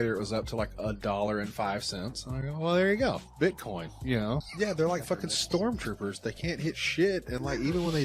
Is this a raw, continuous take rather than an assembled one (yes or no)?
no